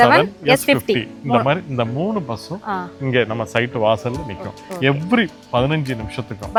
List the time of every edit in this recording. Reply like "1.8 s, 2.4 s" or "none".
none